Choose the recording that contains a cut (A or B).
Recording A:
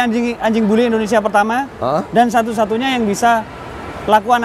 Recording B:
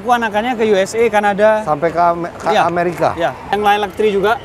B